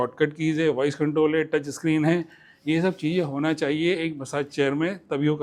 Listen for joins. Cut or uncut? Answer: uncut